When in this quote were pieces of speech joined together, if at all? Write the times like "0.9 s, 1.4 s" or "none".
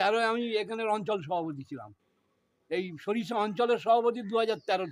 none